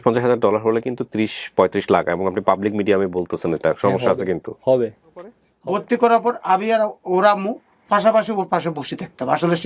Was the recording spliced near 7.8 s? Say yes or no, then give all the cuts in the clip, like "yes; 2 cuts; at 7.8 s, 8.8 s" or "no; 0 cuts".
no; 1 cut; at 5.4 s